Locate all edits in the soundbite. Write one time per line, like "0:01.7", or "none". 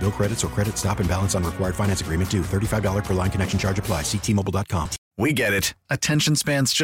0:05.0